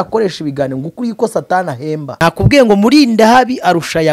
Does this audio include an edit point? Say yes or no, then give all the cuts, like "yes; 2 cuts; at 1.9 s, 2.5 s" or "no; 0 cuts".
yes; 1 cut; at 2.2 s